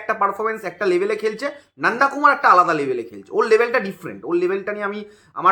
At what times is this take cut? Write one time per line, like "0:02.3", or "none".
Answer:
none

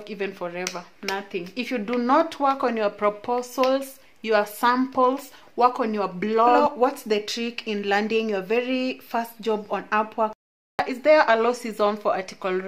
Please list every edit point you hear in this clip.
0:06.6
0:10.8

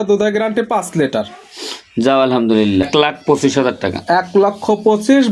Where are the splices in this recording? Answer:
0:02.9

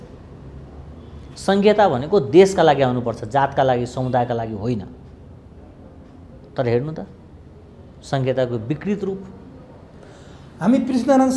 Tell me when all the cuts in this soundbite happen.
none

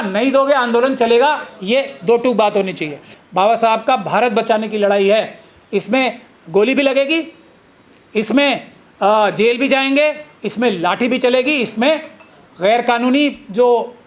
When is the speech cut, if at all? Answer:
0:03.1

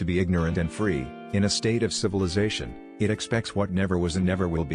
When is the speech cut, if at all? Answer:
none

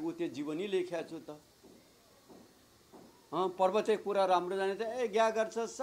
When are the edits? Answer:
none

